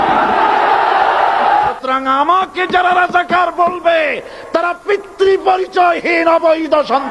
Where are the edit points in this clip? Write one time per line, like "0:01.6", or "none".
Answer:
0:01.6